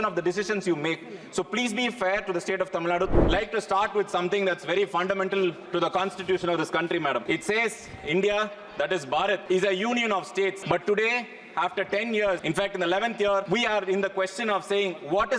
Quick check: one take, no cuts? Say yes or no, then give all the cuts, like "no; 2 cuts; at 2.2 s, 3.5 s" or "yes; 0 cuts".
no; 6 cuts; at 3.1 s, 7.2 s, 9.4 s, 10.6 s, 12.4 s, 13.5 s